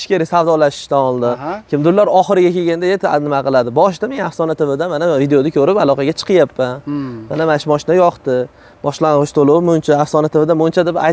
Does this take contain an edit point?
no; 0 cuts

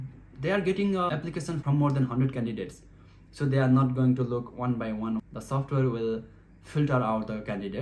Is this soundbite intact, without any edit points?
no; 1 cut; at 5.2 s

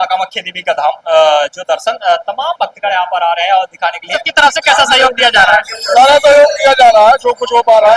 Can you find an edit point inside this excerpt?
yes; 1 cut; at 4.2 s

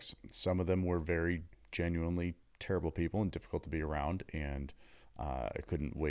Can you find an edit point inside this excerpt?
no; 0 cuts

